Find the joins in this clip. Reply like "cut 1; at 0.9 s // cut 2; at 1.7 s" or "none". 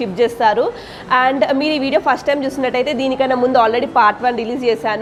none